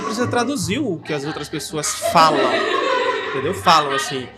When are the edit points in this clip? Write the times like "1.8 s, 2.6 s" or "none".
none